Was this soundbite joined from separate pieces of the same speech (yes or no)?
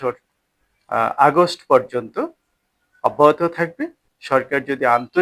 yes